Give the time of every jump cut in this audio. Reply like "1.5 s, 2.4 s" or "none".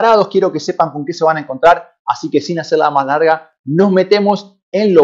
none